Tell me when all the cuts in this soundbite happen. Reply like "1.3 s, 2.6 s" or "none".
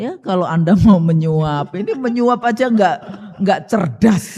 none